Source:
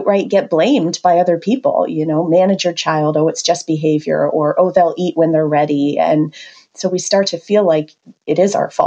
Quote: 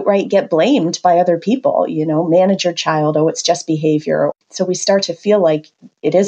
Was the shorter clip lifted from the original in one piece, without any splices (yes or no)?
no